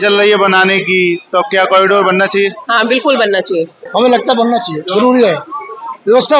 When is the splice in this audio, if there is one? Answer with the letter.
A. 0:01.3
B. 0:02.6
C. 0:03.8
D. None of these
C